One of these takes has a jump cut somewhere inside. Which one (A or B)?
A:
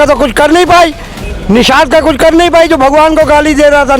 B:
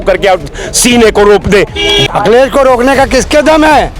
B